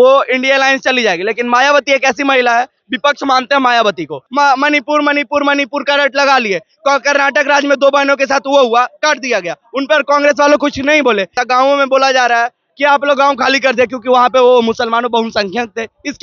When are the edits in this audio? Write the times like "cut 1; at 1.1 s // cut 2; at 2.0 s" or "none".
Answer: cut 1; at 4.2 s // cut 2; at 11.4 s

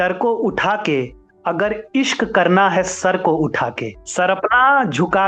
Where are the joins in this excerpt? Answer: cut 1; at 4.0 s

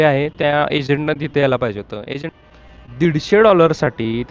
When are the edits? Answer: cut 1; at 2.3 s

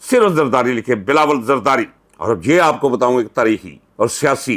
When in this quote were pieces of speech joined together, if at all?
none

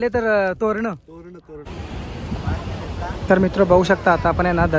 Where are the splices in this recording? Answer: cut 1; at 1.7 s

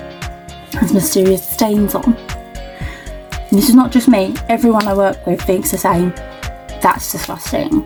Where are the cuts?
none

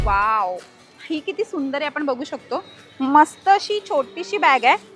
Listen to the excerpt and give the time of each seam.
none

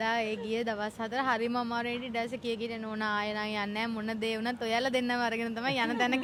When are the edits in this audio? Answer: none

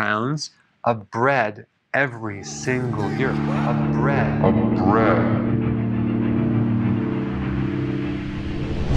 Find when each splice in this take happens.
cut 1; at 3.1 s

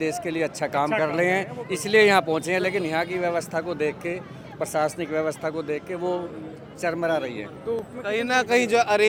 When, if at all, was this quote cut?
none

